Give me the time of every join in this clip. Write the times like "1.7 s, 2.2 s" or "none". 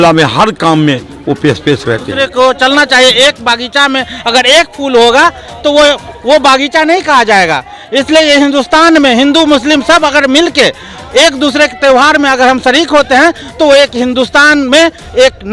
2.1 s